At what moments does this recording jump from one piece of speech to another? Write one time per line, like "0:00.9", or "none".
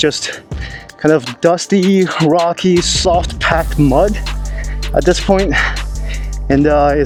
none